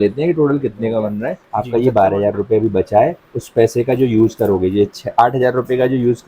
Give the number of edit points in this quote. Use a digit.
1